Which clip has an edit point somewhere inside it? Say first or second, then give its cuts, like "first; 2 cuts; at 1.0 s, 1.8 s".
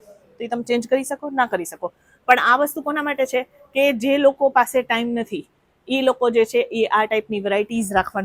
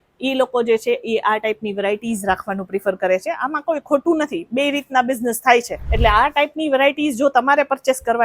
second; 1 cut; at 5.8 s